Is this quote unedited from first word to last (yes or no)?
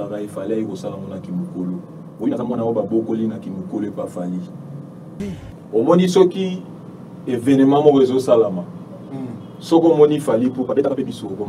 no